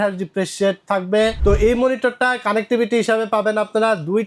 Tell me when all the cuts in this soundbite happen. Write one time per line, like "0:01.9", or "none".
0:01.4